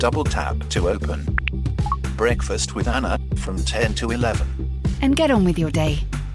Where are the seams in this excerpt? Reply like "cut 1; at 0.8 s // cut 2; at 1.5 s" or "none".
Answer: none